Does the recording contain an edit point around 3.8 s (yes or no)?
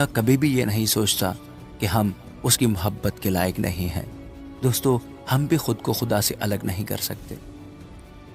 no